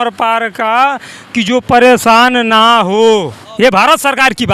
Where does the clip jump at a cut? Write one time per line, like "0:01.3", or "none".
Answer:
0:03.4